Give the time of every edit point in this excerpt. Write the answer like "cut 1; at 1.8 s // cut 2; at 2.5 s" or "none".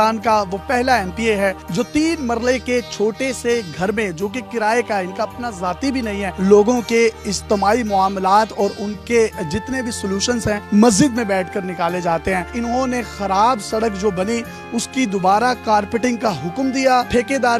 none